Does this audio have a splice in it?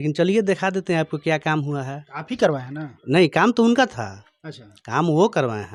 no; 0 cuts

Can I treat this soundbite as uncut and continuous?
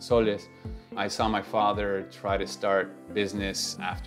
no; 2 cuts; at 1.0 s, 3.0 s

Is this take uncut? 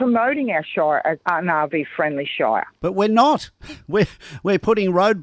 no; 1 cut; at 1.2 s

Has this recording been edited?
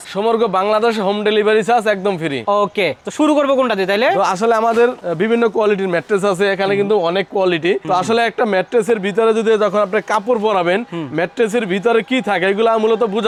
no; 0 cuts

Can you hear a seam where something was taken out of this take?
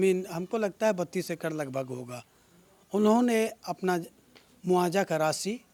no; 0 cuts

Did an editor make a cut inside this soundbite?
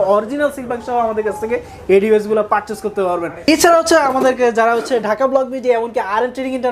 yes; 1 cut; at 3.5 s

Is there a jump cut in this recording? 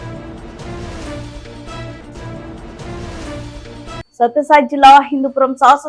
no; 0 cuts

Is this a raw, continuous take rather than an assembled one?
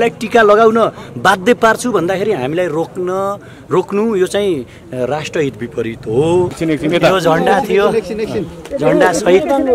yes; 0 cuts

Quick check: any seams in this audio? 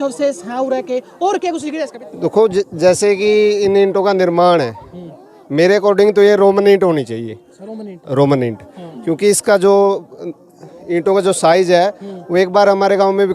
yes; 1 cut; at 1.8 s

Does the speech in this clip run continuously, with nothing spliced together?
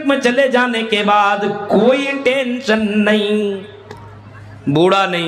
yes; 0 cuts

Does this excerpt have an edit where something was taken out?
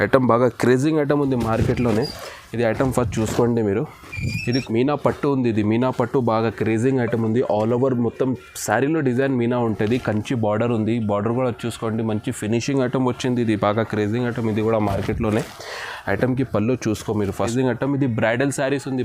yes; 2 cuts; at 4.4 s, 17.4 s

